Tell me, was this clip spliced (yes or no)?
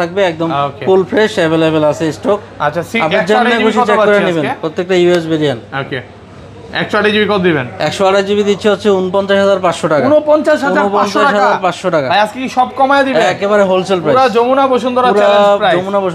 no